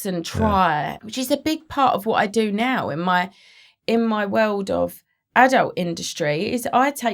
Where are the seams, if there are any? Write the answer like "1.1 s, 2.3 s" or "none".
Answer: 1.0 s